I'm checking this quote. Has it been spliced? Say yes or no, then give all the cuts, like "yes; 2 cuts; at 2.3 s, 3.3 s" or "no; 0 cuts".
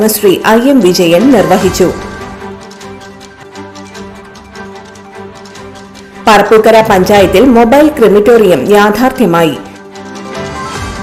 no; 0 cuts